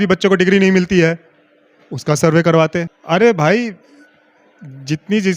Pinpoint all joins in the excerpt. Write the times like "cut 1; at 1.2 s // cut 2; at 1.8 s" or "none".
cut 1; at 3.0 s